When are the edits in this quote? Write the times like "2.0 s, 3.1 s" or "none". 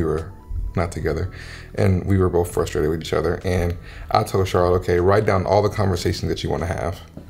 none